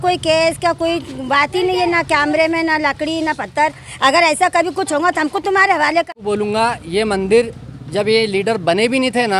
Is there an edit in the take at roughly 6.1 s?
yes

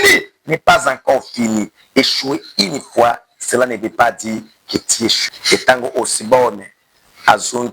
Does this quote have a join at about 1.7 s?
no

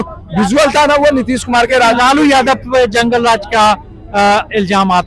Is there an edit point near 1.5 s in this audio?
no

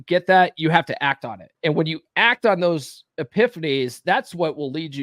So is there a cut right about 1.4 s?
yes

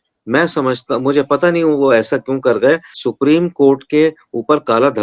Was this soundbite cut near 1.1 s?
no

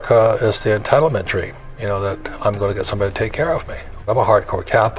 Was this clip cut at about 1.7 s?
no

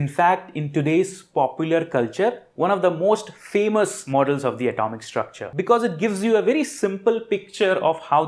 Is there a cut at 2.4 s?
no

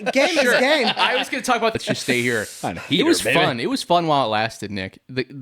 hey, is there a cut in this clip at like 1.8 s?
yes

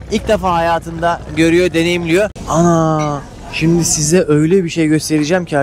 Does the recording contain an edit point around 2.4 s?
yes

